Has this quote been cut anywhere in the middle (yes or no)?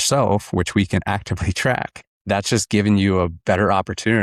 no